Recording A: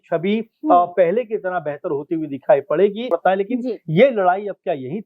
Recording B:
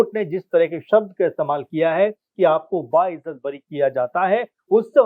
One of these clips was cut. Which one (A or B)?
A